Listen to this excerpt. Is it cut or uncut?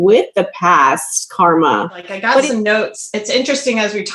cut